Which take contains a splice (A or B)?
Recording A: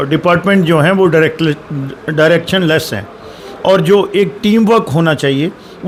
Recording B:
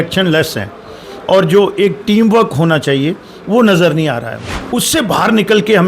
B